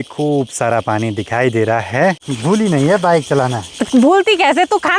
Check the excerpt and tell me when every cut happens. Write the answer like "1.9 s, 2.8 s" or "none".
2.3 s